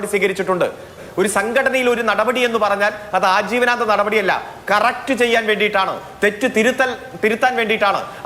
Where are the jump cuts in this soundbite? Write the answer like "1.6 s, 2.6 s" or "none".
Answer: 1.0 s